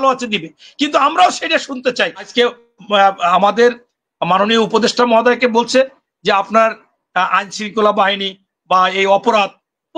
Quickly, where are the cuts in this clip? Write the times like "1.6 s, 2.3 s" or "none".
2.2 s